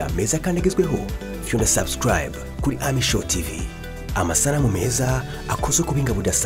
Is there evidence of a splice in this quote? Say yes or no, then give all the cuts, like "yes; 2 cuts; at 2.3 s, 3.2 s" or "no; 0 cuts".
no; 0 cuts